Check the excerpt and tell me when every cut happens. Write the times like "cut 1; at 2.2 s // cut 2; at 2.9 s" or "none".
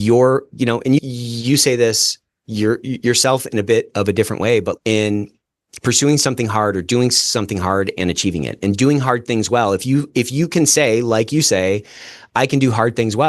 cut 1; at 1.0 s // cut 2; at 4.8 s